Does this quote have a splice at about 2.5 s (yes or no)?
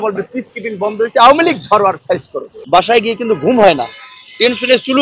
yes